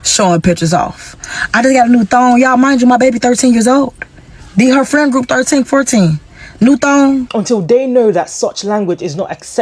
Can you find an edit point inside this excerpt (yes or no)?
yes